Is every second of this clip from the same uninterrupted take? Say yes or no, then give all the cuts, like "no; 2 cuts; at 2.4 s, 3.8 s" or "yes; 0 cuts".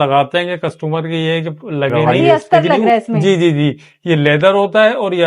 no; 1 cut; at 2.0 s